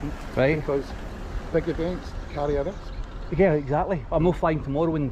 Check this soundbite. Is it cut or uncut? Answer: uncut